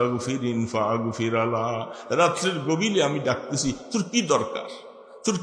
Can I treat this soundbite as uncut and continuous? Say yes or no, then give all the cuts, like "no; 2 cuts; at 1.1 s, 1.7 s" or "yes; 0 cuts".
yes; 0 cuts